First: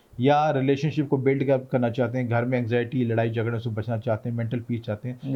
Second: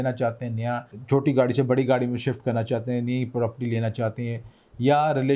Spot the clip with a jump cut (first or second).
second